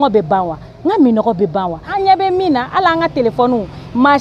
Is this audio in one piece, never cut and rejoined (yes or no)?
no